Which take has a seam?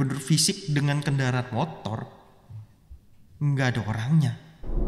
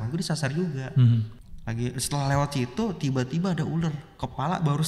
second; 1 cut; at 1.3 s

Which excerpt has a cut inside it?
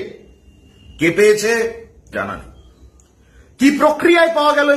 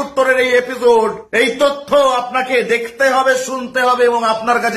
second; 1 cut; at 1.2 s

